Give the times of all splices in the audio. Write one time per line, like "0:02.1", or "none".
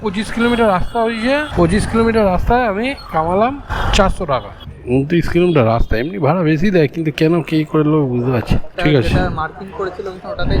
0:01.5
0:04.7
0:08.7